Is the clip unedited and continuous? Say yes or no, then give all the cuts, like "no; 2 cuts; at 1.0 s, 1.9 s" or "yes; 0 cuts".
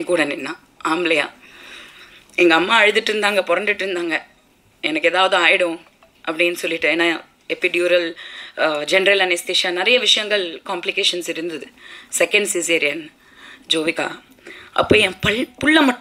yes; 0 cuts